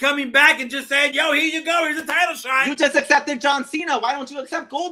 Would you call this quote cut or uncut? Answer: uncut